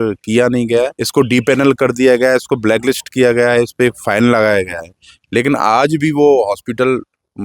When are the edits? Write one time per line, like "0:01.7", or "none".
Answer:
0:01.0